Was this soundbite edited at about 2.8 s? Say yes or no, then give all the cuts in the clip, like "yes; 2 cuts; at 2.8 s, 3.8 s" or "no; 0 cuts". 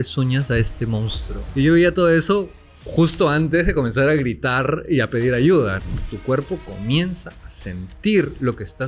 no; 2 cuts; at 1.4 s, 5.8 s